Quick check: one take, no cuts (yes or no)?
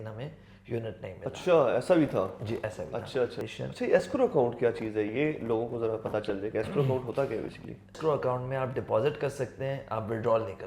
no